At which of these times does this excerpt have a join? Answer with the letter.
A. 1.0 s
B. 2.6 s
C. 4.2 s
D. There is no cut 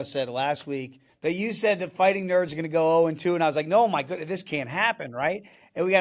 A